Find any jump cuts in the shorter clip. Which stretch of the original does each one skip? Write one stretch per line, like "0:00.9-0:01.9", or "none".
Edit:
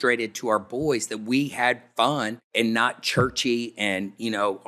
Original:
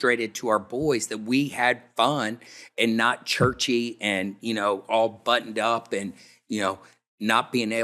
0:02.4-0:02.6